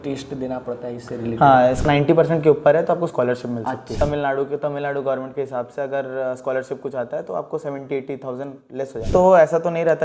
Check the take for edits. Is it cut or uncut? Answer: cut